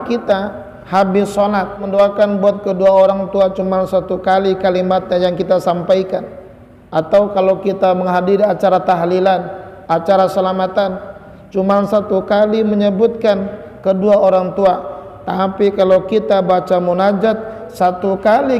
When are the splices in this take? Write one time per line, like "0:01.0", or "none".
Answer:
0:01.8